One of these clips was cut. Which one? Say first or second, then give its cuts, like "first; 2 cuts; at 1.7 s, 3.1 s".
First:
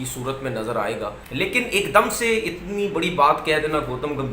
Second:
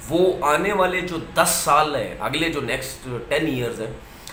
first; 1 cut; at 1.2 s